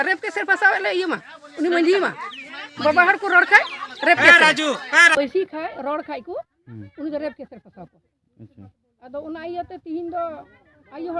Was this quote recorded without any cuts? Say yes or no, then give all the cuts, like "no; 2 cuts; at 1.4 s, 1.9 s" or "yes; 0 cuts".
yes; 0 cuts